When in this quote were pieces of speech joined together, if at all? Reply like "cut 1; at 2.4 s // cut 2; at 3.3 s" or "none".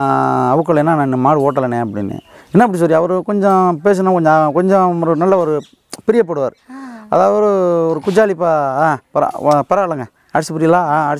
none